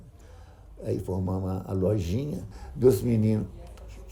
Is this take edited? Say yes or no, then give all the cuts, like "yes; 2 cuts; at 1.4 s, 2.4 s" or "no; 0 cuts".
yes; 1 cut; at 2.6 s